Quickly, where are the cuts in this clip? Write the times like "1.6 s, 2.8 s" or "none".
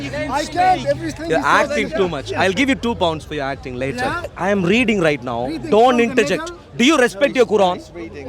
4.3 s